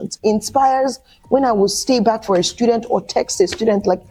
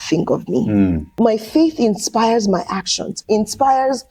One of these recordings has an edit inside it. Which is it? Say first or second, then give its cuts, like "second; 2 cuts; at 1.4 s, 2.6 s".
second; 1 cut; at 1.1 s